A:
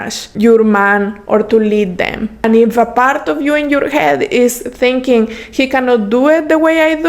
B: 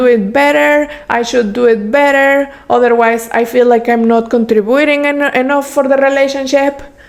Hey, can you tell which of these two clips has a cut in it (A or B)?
A